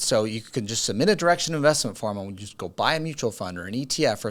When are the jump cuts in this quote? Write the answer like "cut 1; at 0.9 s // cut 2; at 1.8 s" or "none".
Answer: none